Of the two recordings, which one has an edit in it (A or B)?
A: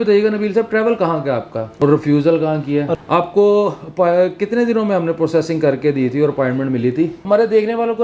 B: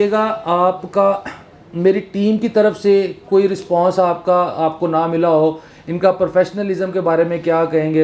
A